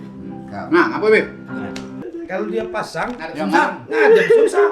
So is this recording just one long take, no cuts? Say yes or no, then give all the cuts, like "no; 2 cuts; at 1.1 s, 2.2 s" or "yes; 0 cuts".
no; 1 cut; at 1.9 s